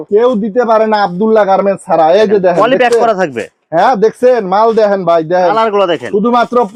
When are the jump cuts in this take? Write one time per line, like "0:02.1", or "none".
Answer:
none